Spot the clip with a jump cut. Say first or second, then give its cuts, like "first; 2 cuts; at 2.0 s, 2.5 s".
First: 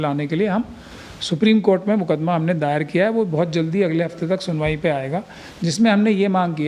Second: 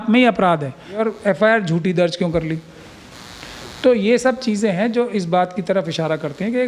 second; 1 cut; at 1.0 s